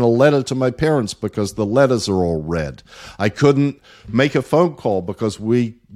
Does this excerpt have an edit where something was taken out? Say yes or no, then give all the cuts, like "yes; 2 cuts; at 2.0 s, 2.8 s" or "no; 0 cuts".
no; 0 cuts